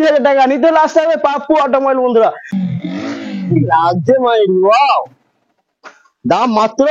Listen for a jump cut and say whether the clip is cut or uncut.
cut